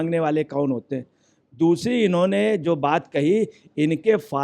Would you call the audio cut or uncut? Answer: uncut